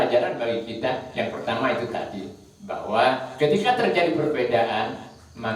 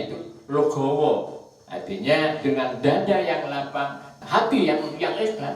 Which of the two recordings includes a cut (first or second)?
second